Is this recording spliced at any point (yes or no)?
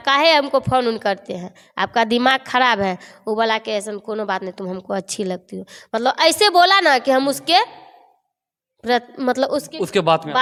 no